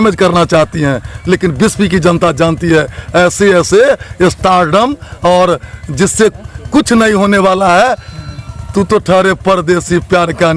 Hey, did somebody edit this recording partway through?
no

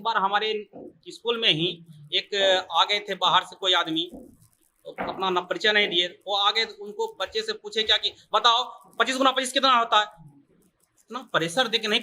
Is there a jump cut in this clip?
no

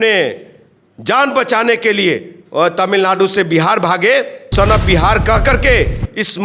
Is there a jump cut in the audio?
yes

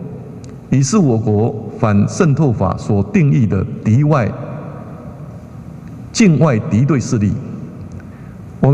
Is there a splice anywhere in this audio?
no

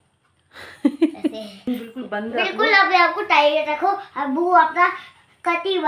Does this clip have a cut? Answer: yes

